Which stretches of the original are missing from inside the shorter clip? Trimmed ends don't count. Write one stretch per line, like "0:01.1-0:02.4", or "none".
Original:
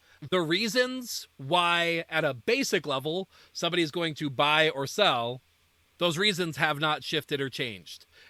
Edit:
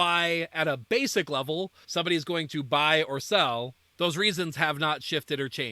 0:03.4-0:03.5
0:05.5-0:05.8